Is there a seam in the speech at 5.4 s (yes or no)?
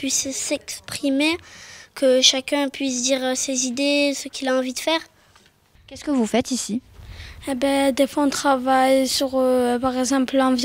yes